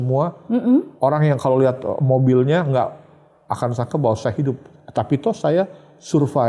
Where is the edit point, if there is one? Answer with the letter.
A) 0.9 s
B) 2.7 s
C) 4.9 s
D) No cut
A